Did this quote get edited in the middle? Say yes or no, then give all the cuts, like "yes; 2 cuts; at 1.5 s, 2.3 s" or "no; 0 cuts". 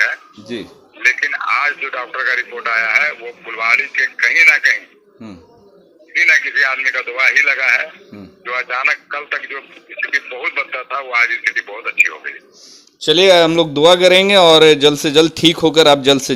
no; 0 cuts